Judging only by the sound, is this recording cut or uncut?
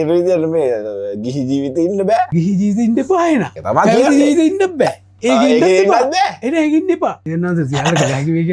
cut